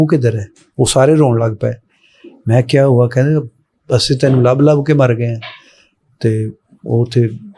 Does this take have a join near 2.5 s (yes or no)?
no